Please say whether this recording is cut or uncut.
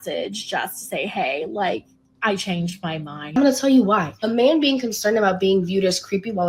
cut